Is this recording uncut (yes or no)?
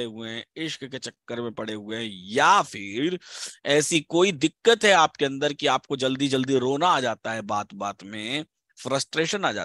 yes